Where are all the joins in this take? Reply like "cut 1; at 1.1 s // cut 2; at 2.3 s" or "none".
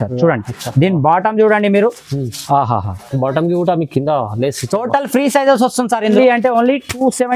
cut 1; at 6.2 s